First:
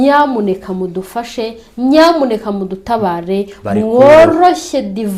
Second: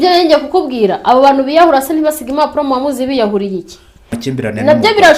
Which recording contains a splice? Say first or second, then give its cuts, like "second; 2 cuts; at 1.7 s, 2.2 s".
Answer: second; 1 cut; at 4.1 s